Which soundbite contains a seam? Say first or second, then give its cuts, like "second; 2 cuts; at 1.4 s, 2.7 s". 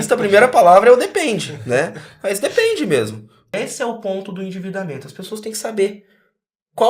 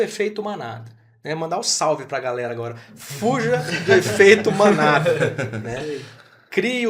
first; 1 cut; at 3.5 s